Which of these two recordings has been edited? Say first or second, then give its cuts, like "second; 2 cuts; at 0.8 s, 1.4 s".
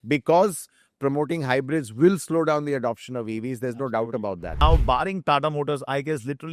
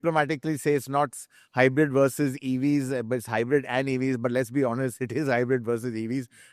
first; 1 cut; at 4.6 s